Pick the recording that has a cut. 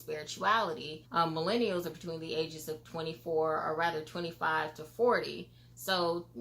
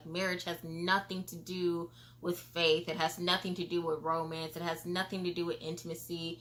first; 1 cut; at 0.9 s

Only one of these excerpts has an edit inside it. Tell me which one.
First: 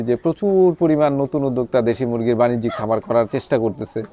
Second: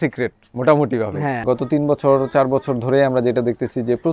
second; 1 cut; at 1.4 s

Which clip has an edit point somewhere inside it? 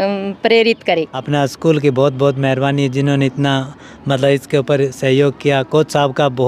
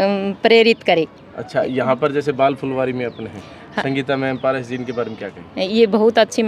first; 1 cut; at 1.2 s

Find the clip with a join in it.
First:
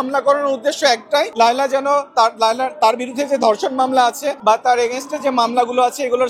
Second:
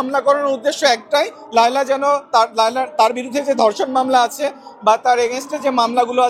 first; 2 cuts; at 1.3 s, 4.3 s

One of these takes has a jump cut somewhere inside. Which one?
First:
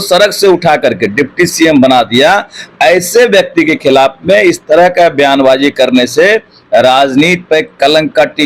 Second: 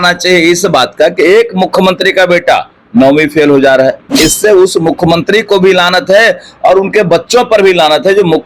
second; 1 cut; at 4.1 s

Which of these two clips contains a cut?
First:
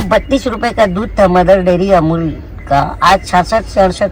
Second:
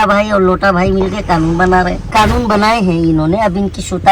second; 1 cut; at 2.0 s

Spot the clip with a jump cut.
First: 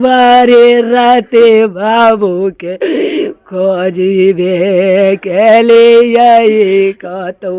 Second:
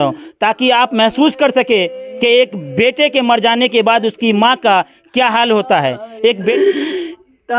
second; 2 cuts; at 1.9 s, 6.0 s

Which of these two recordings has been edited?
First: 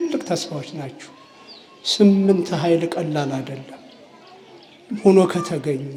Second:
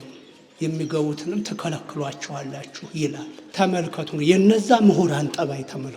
second; 1 cut; at 3.4 s

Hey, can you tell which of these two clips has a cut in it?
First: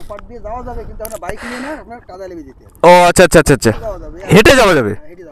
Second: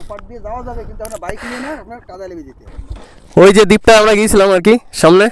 second; 1 cut; at 2.7 s

